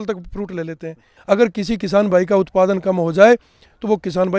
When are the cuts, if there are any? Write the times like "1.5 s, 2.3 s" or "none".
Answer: 1.1 s